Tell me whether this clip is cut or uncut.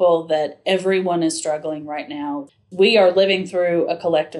cut